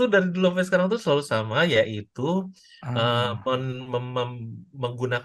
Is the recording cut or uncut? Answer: uncut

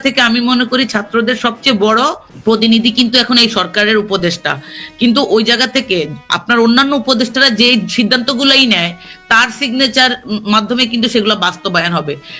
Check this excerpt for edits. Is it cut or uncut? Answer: cut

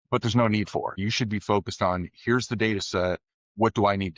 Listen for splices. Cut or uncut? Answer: cut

